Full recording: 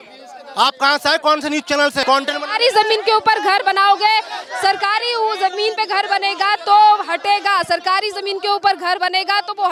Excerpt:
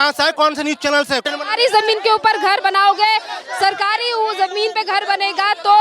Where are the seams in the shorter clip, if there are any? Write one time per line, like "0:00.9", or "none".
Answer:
0:01.2